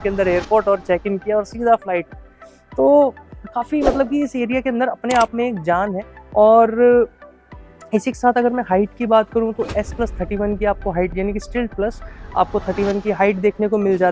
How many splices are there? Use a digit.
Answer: 0